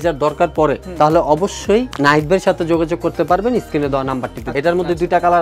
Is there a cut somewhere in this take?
yes; 1 cut; at 4.4 s

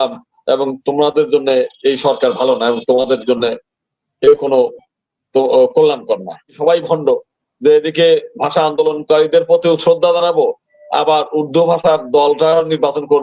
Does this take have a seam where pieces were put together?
yes; 1 cut; at 6.6 s

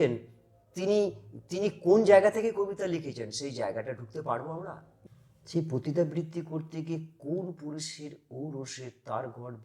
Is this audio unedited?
no; 1 cut; at 4.9 s

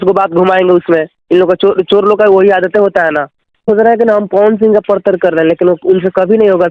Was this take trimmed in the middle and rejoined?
yes; 1 cut; at 3.7 s

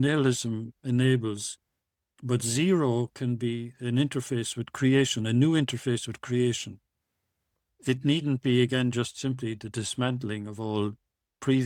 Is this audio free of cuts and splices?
yes; 0 cuts

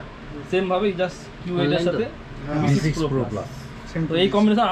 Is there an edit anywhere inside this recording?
no; 0 cuts

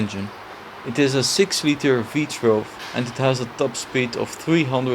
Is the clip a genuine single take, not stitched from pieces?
no; 1 cut; at 2.8 s

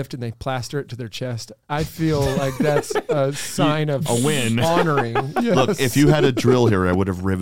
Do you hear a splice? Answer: yes; 1 cut; at 1.5 s

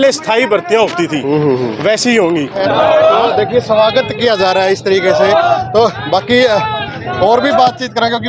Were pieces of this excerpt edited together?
yes; 1 cut; at 2.6 s

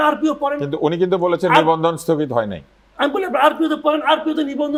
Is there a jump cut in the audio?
no; 0 cuts

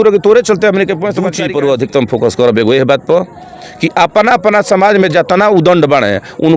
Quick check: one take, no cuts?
no; 1 cut; at 1.3 s

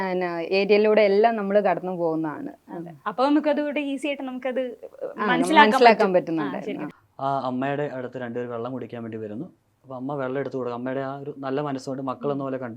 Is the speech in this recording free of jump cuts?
no; 1 cut; at 7.0 s

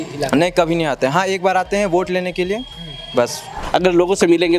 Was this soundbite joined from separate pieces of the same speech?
yes; 1 cut; at 3.5 s

